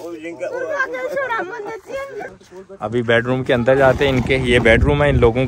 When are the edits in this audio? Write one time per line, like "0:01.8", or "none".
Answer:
0:02.3